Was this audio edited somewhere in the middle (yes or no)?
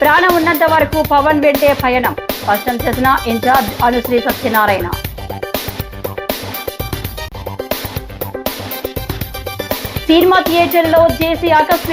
no